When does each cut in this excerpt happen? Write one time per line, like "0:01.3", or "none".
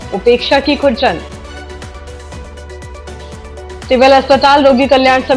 none